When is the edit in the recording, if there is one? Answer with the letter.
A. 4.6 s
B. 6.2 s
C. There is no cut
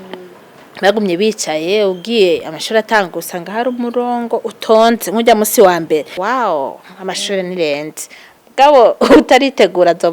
B